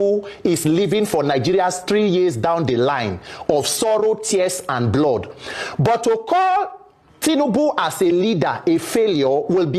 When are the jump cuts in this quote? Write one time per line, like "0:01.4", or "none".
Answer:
none